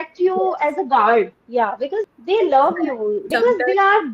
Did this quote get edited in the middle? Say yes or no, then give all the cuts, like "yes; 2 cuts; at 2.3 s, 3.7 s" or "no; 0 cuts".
yes; 2 cuts; at 2.1 s, 3.2 s